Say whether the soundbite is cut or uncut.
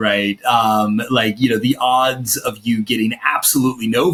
uncut